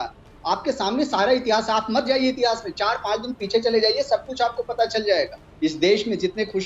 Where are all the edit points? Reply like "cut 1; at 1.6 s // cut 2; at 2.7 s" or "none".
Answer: cut 1; at 5.4 s